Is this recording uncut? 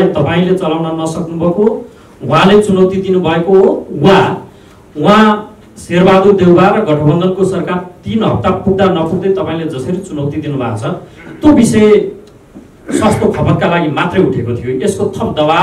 yes; 0 cuts

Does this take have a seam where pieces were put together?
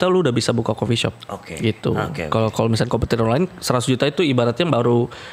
no; 0 cuts

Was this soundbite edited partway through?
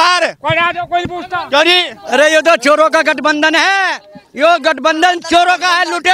no; 0 cuts

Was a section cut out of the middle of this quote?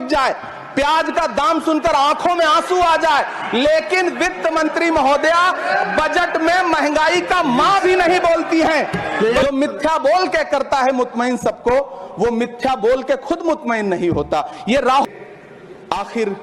yes; 2 cuts; at 9.4 s, 15.0 s

